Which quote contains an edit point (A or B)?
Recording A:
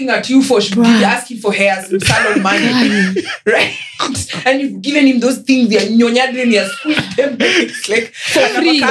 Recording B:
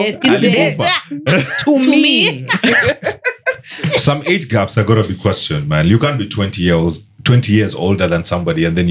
B